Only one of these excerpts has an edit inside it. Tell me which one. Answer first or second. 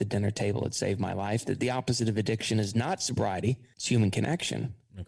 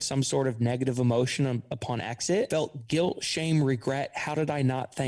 second